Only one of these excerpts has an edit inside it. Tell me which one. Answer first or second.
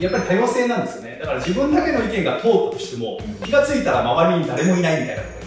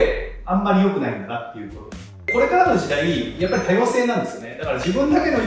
second